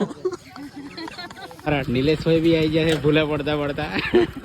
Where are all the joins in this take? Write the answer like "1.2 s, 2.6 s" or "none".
1.7 s